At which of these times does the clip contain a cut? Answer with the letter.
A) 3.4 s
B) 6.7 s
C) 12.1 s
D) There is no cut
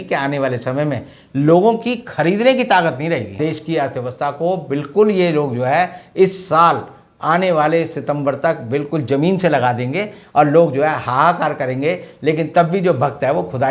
A